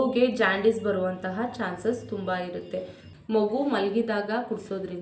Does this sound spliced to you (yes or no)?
yes